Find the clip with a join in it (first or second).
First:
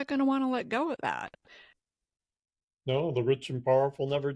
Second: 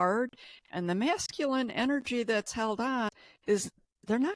second